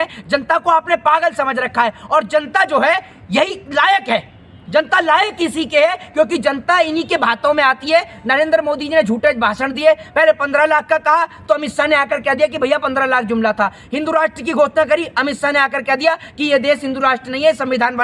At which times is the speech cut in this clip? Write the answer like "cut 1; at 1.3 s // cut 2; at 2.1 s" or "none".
none